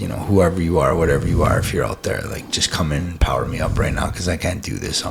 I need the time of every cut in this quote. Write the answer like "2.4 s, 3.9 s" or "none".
none